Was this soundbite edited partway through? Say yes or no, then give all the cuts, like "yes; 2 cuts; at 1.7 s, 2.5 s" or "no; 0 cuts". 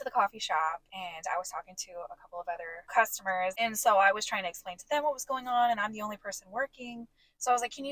yes; 3 cuts; at 0.9 s, 2.8 s, 3.5 s